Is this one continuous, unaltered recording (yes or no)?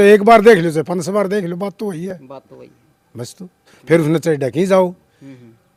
yes